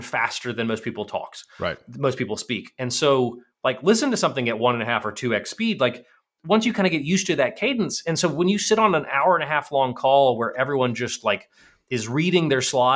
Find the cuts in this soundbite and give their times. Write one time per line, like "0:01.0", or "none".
none